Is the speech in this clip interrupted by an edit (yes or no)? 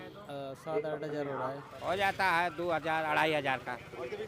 yes